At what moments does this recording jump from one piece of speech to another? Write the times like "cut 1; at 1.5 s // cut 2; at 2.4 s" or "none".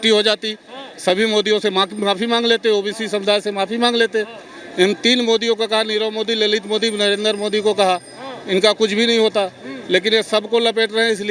none